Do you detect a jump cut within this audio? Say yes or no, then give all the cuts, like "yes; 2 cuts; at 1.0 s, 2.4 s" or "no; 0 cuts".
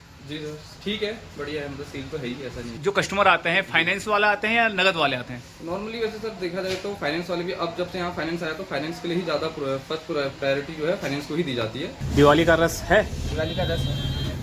yes; 2 cuts; at 2.7 s, 12.0 s